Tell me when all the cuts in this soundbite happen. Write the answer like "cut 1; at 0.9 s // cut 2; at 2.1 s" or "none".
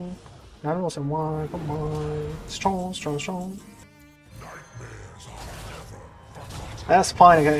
cut 1; at 3.8 s